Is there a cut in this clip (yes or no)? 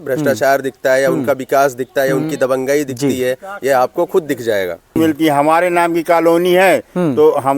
yes